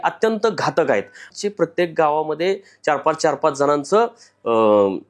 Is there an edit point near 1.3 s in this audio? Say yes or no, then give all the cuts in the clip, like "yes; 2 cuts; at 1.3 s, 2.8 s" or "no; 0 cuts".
yes; 1 cut; at 1.3 s